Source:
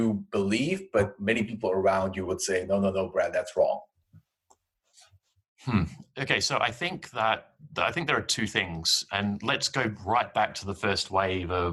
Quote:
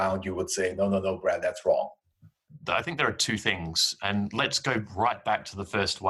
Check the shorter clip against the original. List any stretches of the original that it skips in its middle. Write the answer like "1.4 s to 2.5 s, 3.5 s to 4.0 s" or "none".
4.4 s to 7.6 s

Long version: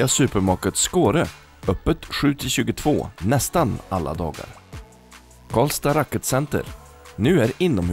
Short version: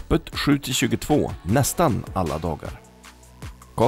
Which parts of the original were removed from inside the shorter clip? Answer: none

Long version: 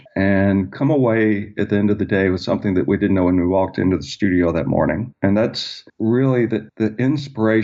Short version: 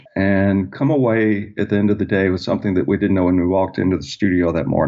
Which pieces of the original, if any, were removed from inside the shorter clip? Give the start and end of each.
none

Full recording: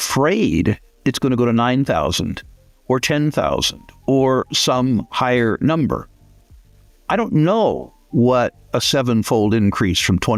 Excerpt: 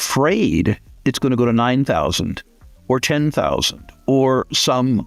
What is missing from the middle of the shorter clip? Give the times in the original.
none

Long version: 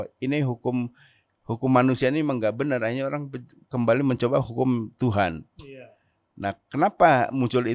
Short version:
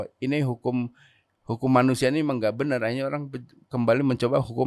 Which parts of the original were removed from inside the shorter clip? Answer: none

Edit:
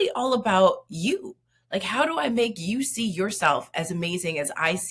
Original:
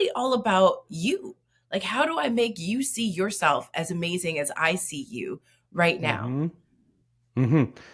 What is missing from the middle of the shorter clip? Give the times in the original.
none

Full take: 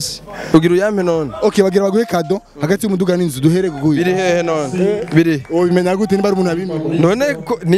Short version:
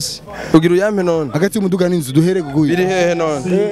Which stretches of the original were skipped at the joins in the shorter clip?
1.3 s to 2.6 s

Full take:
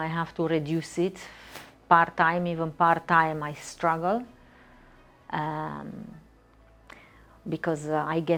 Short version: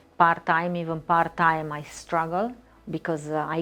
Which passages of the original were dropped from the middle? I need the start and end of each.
4.4 s to 7.3 s

